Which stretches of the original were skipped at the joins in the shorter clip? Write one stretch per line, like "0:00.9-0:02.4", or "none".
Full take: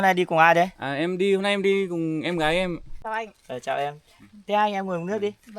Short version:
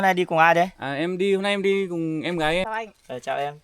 0:02.6-0:03.0